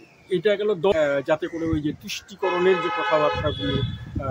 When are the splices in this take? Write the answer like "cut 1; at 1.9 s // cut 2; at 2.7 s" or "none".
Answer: cut 1; at 0.9 s